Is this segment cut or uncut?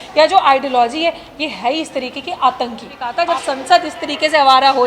cut